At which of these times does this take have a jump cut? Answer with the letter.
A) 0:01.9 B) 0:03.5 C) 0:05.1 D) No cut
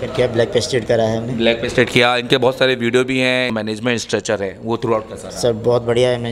B